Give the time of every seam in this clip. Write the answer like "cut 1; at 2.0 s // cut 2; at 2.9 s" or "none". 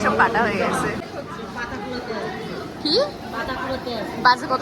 cut 1; at 1.0 s